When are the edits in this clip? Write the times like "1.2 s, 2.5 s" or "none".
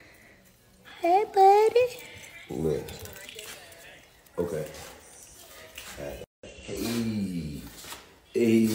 none